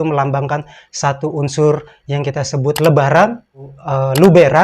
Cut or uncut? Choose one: cut